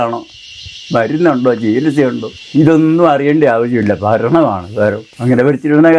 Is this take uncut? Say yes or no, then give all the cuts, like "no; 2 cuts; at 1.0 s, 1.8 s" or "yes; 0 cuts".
no; 2 cuts; at 2.3 s, 5.1 s